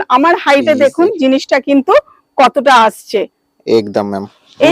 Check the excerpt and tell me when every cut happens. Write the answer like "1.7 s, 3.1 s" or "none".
none